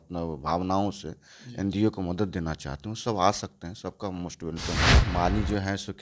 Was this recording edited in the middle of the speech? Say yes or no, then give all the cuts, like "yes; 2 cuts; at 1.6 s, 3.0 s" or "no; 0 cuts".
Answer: yes; 1 cut; at 4.9 s